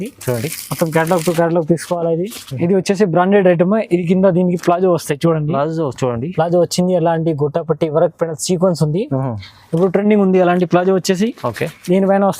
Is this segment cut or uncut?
cut